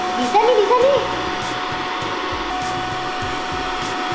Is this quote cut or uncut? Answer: cut